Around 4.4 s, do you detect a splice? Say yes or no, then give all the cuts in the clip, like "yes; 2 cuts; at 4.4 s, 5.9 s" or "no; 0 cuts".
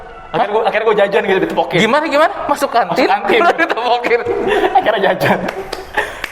no; 0 cuts